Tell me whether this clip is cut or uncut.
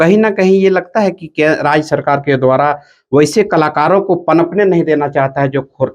uncut